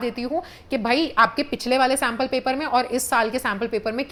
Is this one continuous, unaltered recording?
yes; 0 cuts

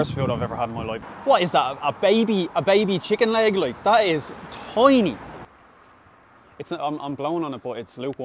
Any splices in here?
yes; 2 cuts; at 0.9 s, 5.4 s

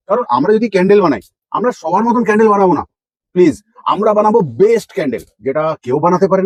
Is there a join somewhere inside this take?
no; 0 cuts

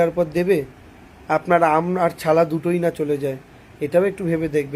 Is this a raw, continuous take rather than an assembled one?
yes; 0 cuts

